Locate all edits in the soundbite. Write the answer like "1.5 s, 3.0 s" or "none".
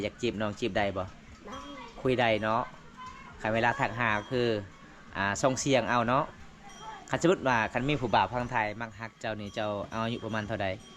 none